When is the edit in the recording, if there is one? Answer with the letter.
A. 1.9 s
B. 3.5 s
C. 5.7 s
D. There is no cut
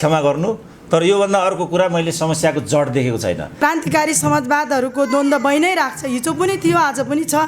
B